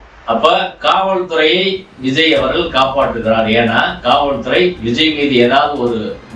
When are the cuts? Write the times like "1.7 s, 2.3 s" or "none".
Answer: none